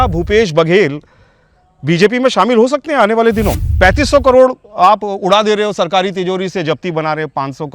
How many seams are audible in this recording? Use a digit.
1